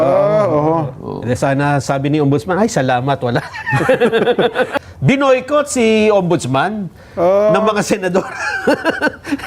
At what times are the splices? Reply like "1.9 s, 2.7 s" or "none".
4.8 s